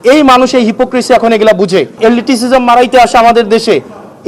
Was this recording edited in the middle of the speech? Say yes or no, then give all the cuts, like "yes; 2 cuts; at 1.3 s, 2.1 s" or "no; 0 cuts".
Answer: yes; 1 cut; at 1.9 s